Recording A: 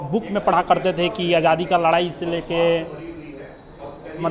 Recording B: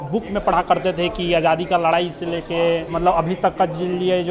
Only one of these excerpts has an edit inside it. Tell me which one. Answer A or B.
B